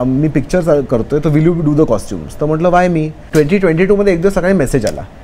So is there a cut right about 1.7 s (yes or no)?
no